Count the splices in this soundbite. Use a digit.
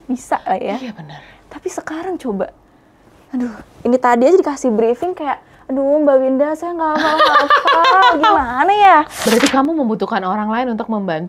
1